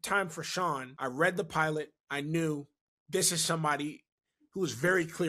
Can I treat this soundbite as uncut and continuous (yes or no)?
no